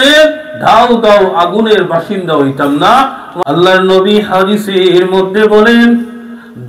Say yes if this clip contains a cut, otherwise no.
yes